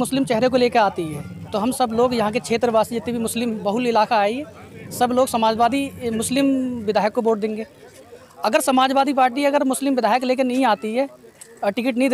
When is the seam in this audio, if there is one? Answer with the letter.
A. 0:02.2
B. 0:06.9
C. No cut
C